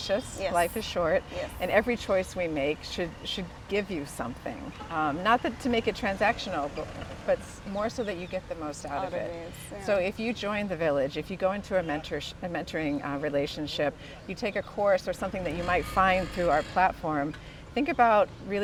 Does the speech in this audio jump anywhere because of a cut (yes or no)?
no